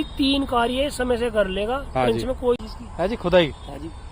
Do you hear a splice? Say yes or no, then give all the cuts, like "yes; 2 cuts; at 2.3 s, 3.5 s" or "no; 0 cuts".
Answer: yes; 1 cut; at 2.7 s